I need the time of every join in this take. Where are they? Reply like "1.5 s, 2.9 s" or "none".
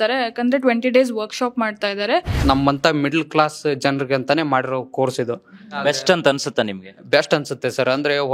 2.3 s, 5.8 s